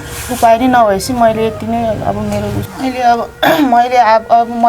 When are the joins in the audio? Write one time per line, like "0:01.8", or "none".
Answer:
0:02.6